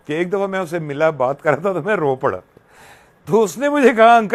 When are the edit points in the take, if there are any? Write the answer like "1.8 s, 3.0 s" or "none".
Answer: none